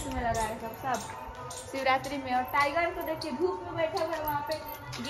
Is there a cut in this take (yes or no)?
no